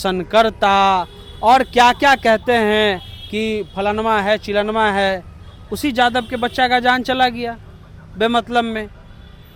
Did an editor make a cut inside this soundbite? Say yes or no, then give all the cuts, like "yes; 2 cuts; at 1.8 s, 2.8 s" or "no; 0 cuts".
no; 0 cuts